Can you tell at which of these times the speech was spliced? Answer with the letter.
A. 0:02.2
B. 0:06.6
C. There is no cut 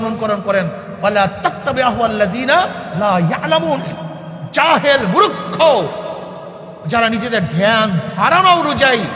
C